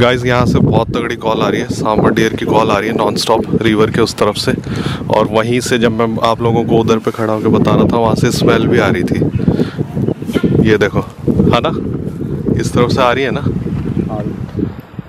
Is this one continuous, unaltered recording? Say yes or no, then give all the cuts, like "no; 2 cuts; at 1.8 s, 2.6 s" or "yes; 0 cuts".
yes; 0 cuts